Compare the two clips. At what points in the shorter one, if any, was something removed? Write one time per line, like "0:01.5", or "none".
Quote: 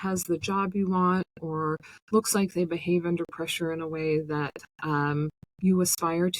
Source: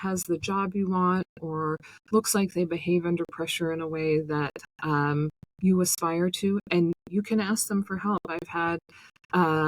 none